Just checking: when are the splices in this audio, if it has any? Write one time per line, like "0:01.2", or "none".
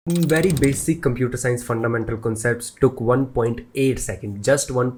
none